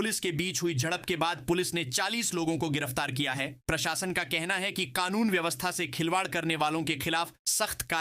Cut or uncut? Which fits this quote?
uncut